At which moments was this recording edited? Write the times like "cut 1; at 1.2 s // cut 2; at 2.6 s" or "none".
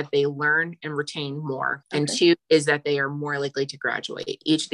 cut 1; at 2.4 s

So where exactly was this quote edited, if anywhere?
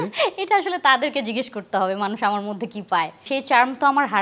cut 1; at 3.2 s

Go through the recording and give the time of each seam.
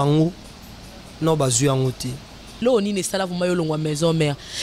cut 1; at 2.6 s

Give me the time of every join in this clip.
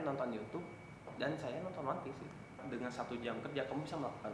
cut 1; at 2.6 s

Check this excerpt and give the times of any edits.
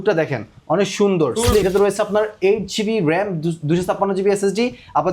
cut 1; at 1.6 s

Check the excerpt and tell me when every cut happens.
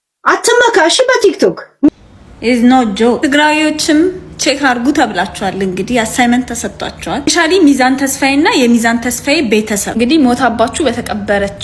cut 1; at 1.9 s

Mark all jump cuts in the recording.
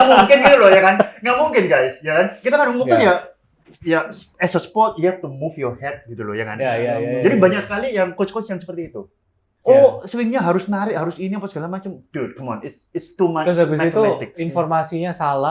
none

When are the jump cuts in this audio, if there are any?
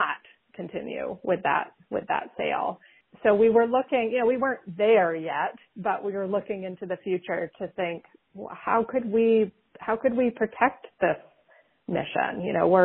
none

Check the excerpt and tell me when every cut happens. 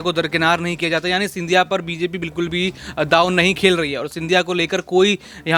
none

